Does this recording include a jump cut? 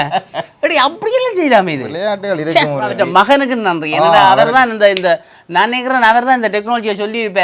yes; 1 cut; at 2.9 s

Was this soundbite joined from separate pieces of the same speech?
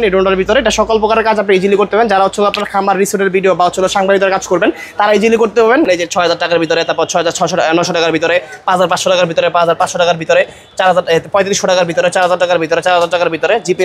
yes; 1 cut; at 5.9 s

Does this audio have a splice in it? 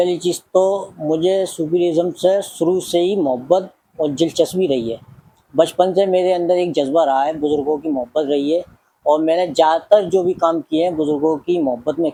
no; 0 cuts

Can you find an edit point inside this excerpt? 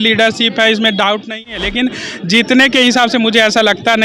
yes; 1 cut; at 1.5 s

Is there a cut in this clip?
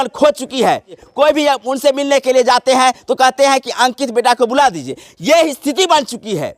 yes; 1 cut; at 0.9 s

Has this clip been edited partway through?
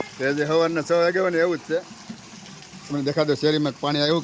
no; 0 cuts

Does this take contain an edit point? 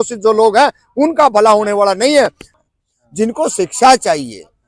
yes; 1 cut; at 2.5 s

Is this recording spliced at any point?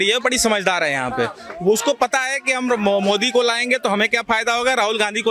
no; 0 cuts

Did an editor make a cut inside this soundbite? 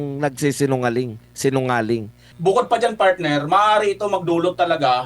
yes; 1 cut; at 2.3 s

